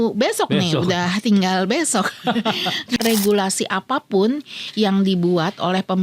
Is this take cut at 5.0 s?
no; 1 cut; at 3.0 s

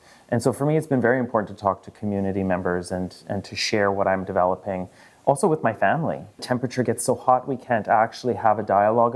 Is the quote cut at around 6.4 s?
yes; 1 cut; at 6.4 s

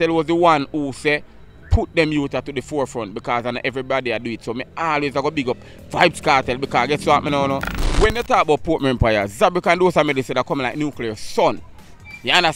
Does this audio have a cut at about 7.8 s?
yes; 1 cut; at 7.8 s

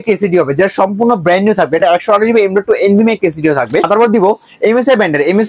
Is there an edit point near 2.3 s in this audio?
no; 1 cut; at 3.9 s

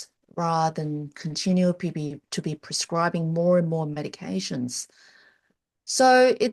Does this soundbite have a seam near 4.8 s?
no; 0 cuts

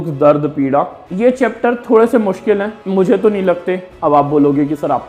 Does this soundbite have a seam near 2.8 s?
yes; 2 cuts; at 1.0 s, 2.8 s

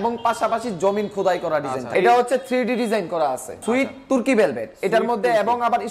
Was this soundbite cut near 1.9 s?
yes; 2 cuts; at 1.9 s, 3.6 s

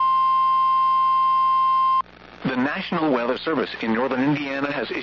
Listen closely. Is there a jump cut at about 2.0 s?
yes; 1 cut; at 2.0 s

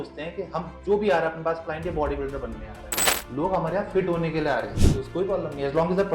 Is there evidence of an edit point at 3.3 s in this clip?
no; 1 cut; at 4.7 s

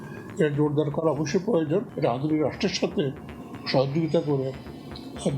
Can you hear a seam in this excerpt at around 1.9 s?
yes; 1 cut; at 1.9 s

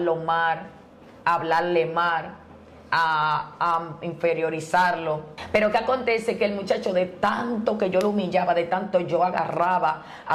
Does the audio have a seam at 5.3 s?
yes; 1 cut; at 5.3 s

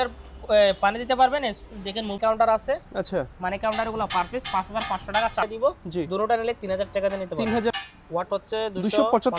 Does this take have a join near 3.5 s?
no; 3 cuts; at 2.1 s, 5.4 s, 7.8 s

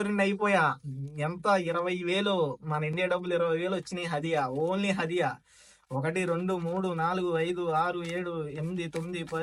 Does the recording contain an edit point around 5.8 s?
no; 0 cuts

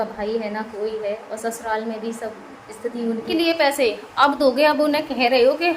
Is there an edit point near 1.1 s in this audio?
no; 1 cut; at 3.3 s

